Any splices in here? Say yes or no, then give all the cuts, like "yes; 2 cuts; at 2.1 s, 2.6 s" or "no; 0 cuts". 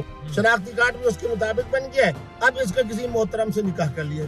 no; 0 cuts